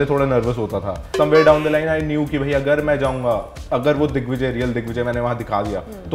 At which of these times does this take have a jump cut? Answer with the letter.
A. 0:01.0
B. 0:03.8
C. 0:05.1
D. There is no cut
A